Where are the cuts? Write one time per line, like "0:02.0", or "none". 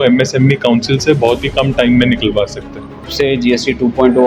0:03.1